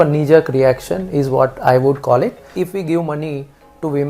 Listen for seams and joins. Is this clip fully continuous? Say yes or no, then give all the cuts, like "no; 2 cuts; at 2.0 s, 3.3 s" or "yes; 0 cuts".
no; 1 cut; at 2.5 s